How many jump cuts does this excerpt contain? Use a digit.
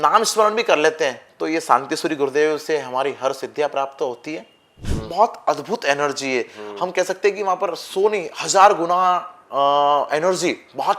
1